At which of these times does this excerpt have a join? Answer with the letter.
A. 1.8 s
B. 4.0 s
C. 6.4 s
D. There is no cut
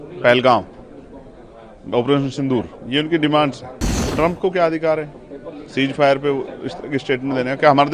B